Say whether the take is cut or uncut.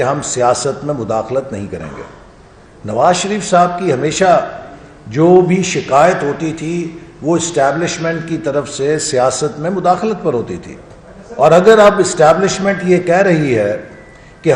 uncut